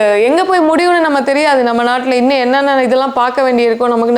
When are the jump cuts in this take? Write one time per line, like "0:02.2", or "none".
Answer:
none

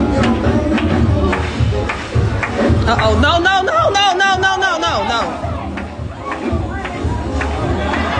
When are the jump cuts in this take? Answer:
none

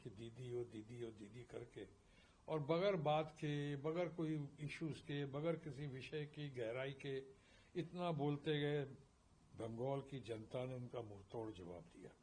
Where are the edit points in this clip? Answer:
none

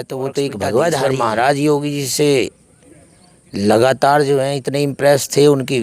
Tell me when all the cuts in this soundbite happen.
0:01.0

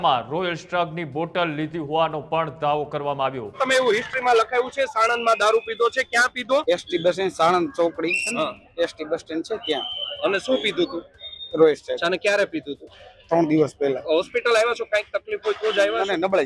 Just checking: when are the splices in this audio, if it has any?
0:03.6
0:06.6
0:12.0
0:14.0

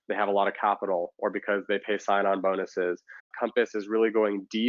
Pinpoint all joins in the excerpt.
0:03.3

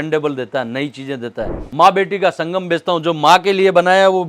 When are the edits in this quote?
0:01.6

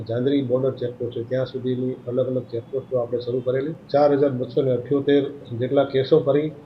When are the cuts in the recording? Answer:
0:03.8

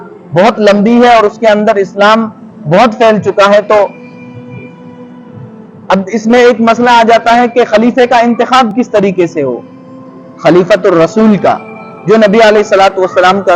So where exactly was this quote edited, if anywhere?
none

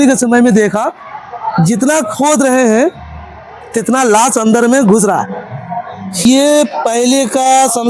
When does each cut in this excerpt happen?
0:06.2

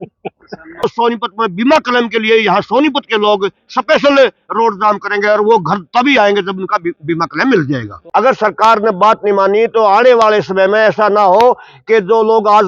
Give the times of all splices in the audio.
0:00.8
0:07.9

